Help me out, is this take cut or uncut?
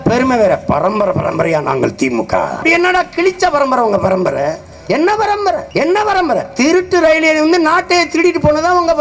cut